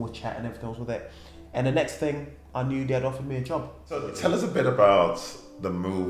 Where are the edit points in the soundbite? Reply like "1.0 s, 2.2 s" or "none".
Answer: 4.1 s